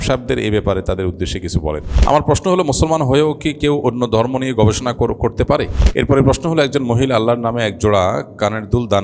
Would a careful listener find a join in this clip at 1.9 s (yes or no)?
yes